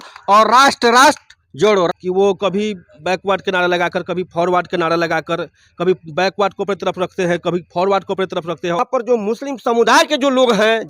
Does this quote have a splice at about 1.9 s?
yes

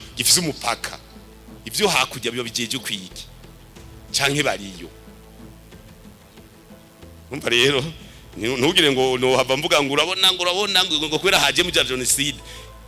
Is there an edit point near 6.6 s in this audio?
yes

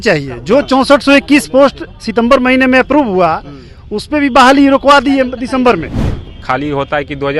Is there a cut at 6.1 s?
yes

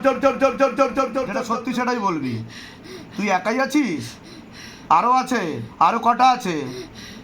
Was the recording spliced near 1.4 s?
yes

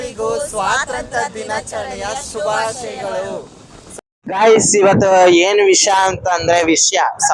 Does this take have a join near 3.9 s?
yes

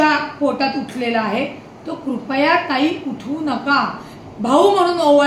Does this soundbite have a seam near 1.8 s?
no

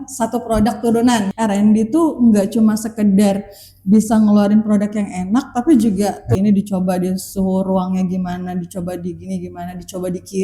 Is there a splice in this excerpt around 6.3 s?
yes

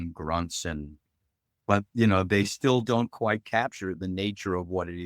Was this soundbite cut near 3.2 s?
no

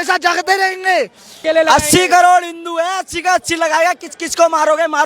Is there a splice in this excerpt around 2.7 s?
no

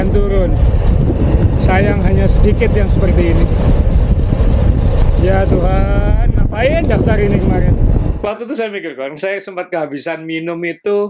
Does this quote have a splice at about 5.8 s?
no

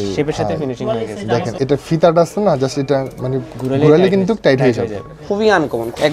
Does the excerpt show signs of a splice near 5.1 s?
yes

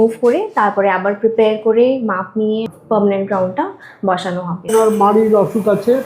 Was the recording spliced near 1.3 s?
no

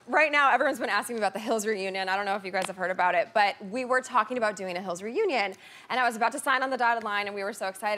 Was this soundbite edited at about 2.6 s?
yes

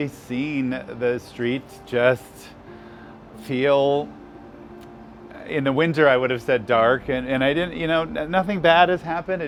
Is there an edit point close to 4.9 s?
no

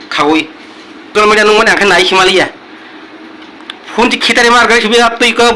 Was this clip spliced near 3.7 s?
no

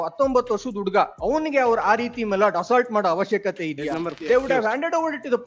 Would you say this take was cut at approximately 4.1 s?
yes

